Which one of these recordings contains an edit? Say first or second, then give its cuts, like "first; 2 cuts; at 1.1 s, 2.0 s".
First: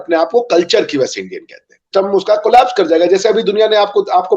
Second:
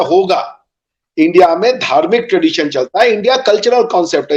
first; 1 cut; at 1.9 s